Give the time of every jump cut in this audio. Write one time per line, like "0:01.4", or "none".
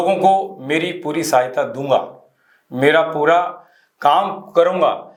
none